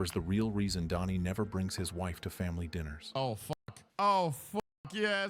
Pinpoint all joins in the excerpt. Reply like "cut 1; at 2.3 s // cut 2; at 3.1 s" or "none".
cut 1; at 3.5 s